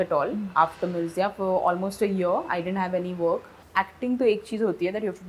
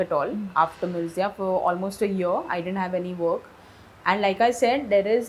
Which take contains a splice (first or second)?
first